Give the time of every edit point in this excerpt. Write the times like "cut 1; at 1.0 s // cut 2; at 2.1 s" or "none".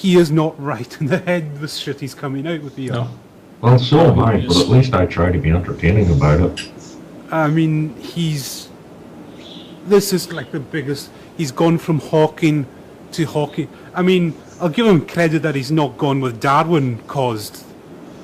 none